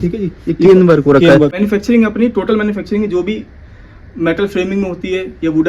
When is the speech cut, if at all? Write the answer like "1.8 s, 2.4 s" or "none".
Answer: 1.5 s